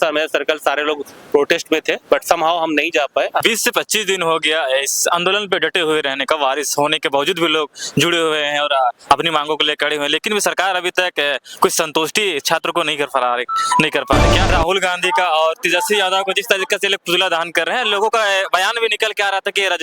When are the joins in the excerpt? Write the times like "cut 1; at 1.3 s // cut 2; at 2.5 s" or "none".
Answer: cut 1; at 3.5 s // cut 2; at 14.5 s

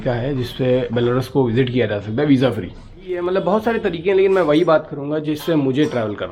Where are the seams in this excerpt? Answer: cut 1; at 3.2 s

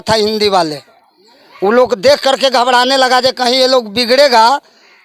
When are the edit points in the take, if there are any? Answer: none

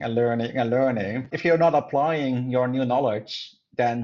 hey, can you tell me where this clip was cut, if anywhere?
cut 1; at 1.3 s

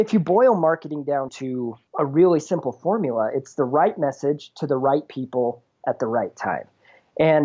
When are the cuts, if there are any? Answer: cut 1; at 1.4 s

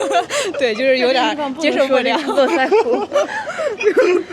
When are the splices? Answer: none

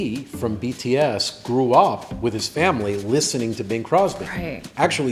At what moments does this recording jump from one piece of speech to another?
none

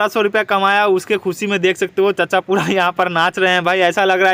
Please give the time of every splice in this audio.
none

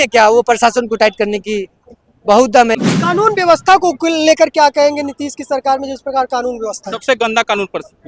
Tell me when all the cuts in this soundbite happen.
cut 1; at 2.8 s

